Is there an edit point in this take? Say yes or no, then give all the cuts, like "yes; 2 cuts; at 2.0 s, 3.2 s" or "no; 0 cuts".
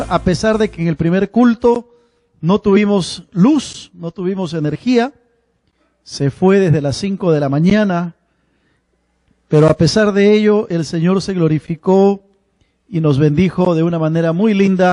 no; 0 cuts